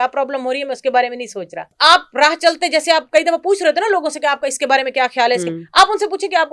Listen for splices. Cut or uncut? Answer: cut